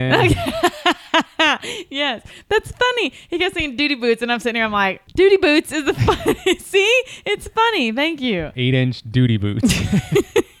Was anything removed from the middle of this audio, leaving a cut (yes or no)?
yes